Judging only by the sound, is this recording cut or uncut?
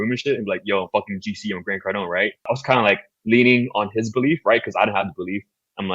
cut